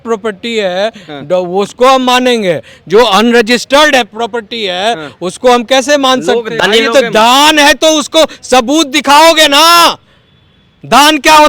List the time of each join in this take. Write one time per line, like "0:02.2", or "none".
0:06.5